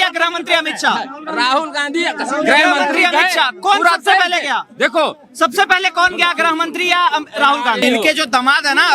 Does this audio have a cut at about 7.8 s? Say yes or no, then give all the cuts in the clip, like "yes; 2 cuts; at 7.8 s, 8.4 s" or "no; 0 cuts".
yes; 1 cut; at 7.8 s